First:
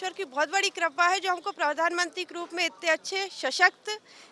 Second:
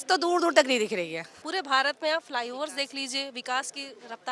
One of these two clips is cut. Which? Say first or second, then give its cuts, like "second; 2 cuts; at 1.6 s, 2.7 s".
second; 1 cut; at 1.4 s